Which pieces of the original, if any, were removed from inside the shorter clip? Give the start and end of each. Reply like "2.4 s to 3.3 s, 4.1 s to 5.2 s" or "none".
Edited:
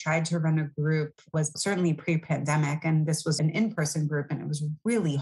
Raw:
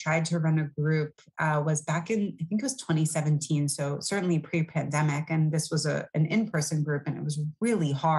1.3 s to 3.8 s, 5.8 s to 6.1 s